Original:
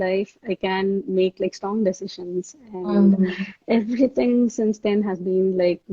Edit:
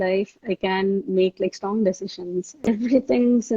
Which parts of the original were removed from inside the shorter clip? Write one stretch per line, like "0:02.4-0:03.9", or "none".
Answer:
0:02.7-0:03.7